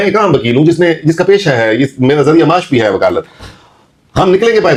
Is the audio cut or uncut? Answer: uncut